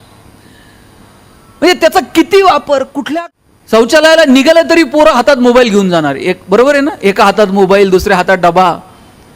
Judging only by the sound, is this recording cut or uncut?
cut